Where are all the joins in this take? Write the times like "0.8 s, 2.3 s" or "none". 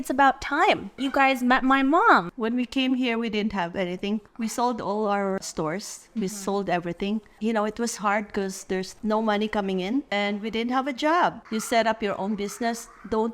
2.3 s, 5.4 s, 7.4 s, 10.1 s, 11.4 s

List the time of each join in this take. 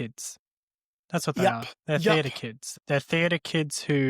1.7 s, 2.8 s

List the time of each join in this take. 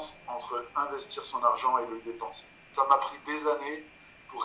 2.7 s

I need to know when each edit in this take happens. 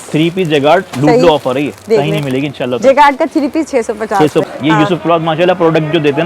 4.4 s

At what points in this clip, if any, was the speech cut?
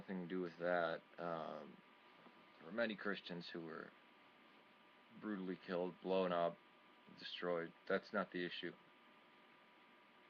5.0 s

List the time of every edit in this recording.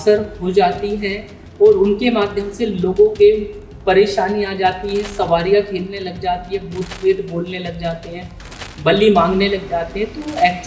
none

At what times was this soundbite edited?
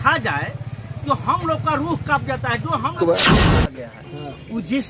2.9 s, 3.9 s

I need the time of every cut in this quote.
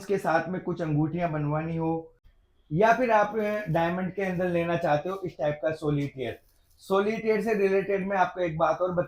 none

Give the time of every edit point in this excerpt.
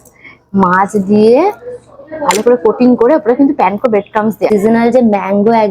4.5 s

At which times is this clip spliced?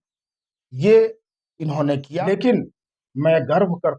2.1 s

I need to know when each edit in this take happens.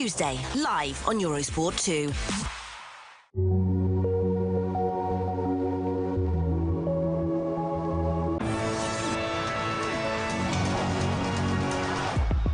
8.4 s

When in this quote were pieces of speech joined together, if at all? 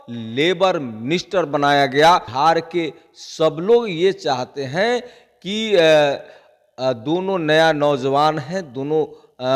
2.3 s

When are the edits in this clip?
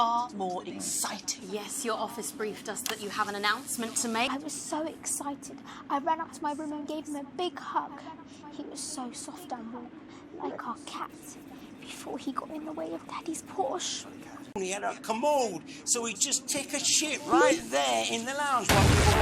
4.3 s, 14.5 s

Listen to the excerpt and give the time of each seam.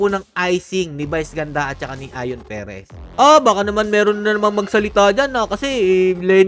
2.9 s

